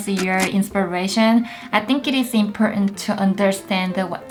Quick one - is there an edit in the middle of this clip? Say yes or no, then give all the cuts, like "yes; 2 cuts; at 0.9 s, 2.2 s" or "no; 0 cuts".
no; 0 cuts